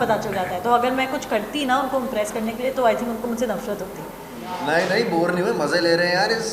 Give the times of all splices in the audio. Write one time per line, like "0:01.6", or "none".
0:04.4